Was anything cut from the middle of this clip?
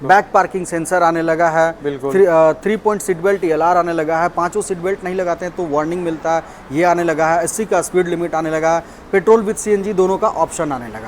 no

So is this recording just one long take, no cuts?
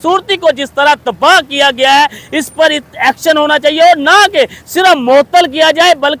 yes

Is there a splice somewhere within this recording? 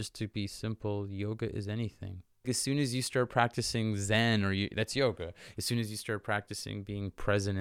yes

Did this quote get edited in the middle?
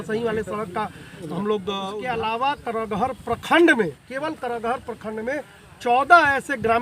yes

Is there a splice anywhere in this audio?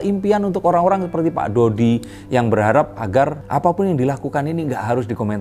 no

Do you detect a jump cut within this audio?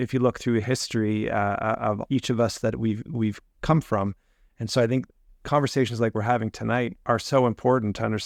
no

